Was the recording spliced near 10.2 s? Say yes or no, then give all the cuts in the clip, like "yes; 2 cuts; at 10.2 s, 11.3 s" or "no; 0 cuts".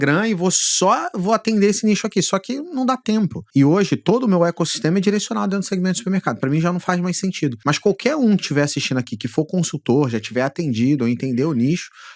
no; 2 cuts; at 3.4 s, 7.6 s